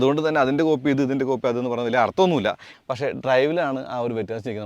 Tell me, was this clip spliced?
yes; 1 cut; at 2.7 s

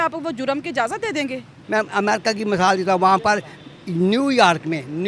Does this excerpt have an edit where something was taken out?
yes; 1 cut; at 1.6 s

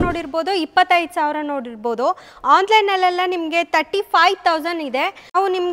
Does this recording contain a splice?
no; 0 cuts

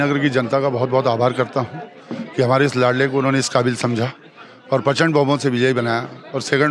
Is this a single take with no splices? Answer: yes; 0 cuts

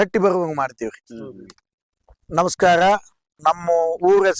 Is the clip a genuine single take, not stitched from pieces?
no; 2 cuts; at 2.2 s, 3.3 s

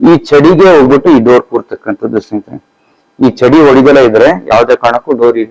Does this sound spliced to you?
no; 0 cuts

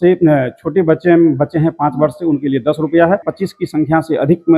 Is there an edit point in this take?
yes; 1 cut; at 3.3 s

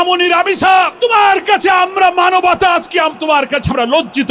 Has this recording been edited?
yes; 1 cut; at 0.9 s

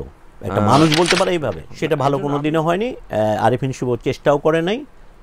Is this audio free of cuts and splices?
no; 1 cut; at 1.6 s

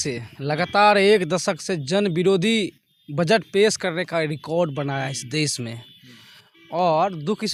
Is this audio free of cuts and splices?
yes; 0 cuts

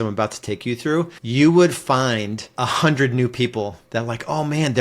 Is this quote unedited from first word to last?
no; 2 cuts; at 1.2 s, 2.4 s

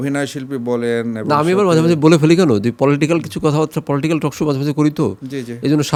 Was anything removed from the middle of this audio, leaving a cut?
no; 0 cuts

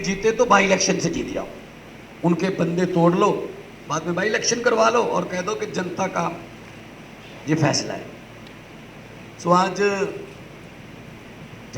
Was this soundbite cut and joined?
no; 0 cuts

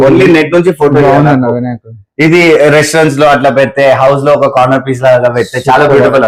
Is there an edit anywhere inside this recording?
no; 0 cuts

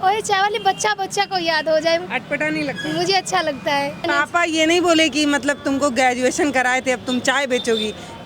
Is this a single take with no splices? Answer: no; 1 cut; at 4.0 s

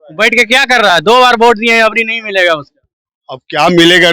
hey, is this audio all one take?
yes; 0 cuts

